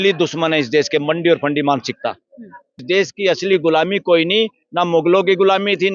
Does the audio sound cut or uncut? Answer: cut